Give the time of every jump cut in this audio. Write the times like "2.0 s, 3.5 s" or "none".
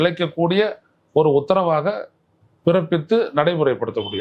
none